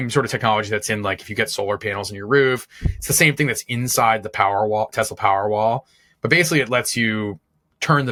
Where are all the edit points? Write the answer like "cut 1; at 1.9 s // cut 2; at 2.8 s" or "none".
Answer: none